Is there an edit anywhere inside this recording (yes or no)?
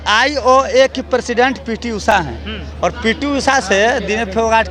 no